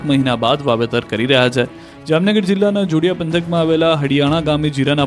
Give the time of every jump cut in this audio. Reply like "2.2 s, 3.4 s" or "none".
2.4 s